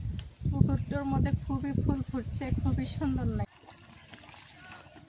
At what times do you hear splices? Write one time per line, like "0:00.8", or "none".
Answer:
0:03.4